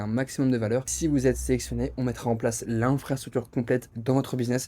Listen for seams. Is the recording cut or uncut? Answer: cut